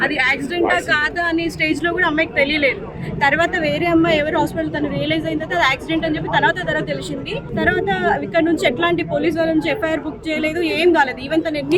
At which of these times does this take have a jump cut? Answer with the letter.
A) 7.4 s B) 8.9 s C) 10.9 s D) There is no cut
A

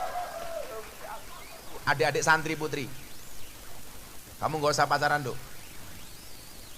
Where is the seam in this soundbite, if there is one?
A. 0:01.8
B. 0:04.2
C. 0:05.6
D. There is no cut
A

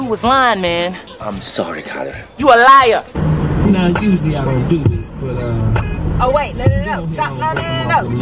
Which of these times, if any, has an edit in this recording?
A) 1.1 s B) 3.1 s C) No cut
B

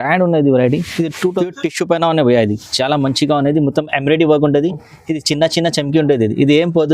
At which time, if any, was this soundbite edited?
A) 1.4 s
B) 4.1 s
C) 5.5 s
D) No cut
A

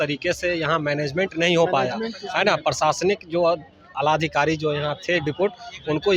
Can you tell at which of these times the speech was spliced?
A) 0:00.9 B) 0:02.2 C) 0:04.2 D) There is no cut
D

